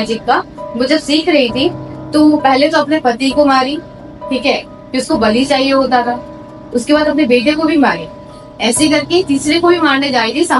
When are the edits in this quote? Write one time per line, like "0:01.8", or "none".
none